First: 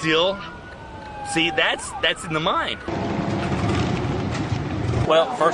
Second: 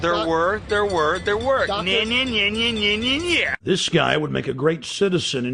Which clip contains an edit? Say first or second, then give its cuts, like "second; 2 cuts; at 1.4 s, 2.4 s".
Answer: first; 1 cut; at 1.1 s